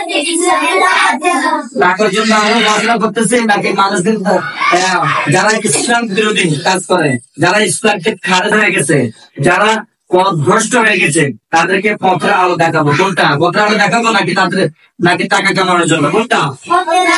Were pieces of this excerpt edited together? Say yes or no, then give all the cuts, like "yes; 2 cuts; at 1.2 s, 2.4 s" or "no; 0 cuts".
no; 0 cuts